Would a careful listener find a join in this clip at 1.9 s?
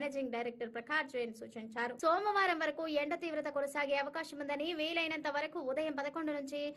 no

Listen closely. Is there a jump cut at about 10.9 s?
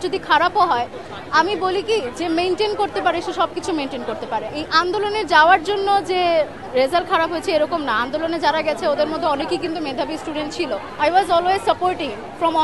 yes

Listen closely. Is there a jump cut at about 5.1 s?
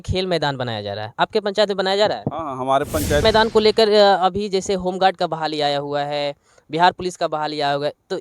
no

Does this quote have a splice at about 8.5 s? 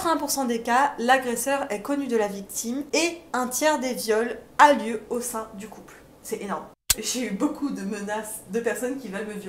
no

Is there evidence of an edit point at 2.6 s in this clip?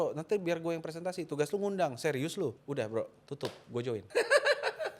yes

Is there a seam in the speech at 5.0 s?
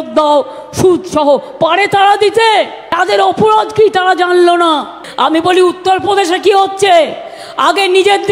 yes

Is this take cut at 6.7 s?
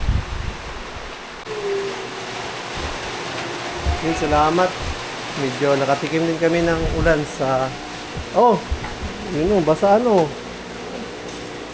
no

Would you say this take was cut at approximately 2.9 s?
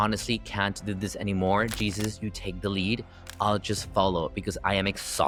no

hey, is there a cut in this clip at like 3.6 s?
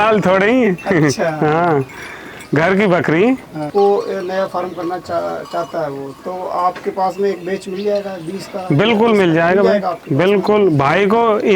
yes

